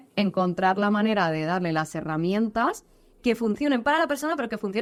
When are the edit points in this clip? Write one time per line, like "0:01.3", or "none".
none